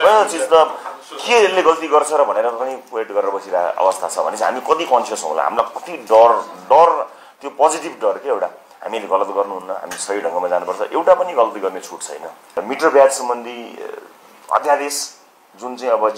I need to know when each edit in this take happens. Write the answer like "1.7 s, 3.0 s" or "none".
12.6 s